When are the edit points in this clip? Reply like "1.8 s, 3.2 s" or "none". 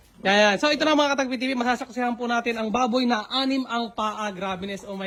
none